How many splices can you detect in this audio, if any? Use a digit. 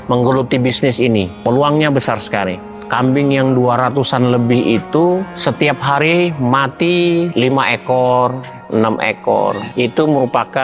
2